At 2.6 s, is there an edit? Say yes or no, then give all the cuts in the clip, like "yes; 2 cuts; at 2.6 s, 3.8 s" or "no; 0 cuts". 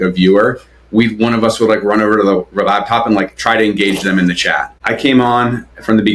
no; 1 cut; at 4.7 s